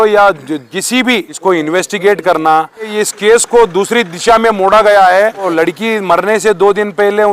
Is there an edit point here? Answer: yes; 3 cuts; at 1.3 s, 2.9 s, 5.5 s

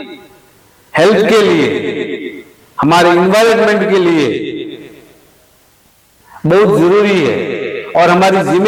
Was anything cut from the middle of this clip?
no; 0 cuts

